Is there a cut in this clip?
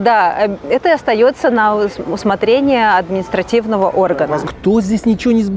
yes; 1 cut; at 4.4 s

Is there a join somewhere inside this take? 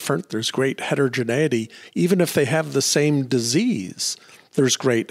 no; 0 cuts

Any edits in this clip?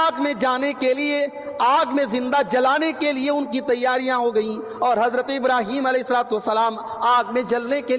no; 0 cuts

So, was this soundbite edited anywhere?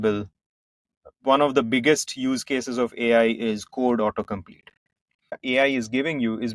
yes; 1 cut; at 5.3 s

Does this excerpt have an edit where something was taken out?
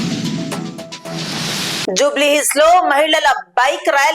yes; 1 cut; at 1.8 s

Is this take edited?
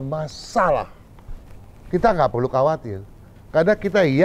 no; 0 cuts

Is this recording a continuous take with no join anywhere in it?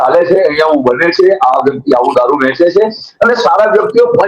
yes; 0 cuts

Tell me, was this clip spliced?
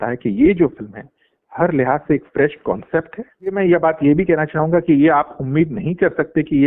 yes; 1 cut; at 3.5 s

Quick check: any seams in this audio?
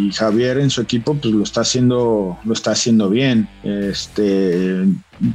no; 0 cuts

